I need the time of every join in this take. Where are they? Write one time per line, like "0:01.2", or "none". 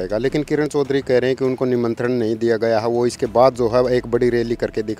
none